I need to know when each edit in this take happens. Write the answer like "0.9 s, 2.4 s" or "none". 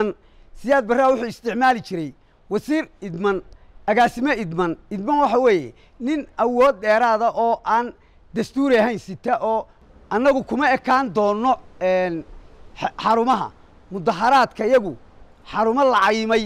9.8 s